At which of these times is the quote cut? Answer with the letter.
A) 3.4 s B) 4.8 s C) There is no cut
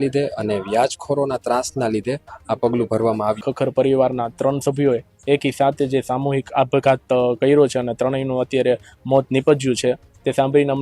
A